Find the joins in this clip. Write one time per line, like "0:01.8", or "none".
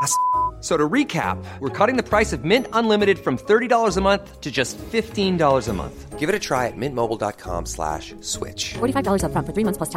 none